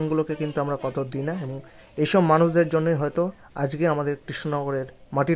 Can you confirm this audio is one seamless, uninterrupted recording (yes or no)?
yes